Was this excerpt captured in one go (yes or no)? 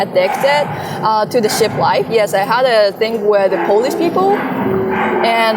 yes